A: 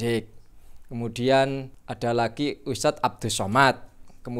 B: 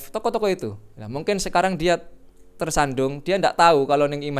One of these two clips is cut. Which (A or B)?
A